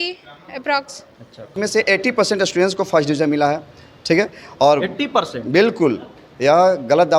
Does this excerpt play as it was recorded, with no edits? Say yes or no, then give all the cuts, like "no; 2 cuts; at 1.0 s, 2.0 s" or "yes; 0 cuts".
no; 1 cut; at 1.5 s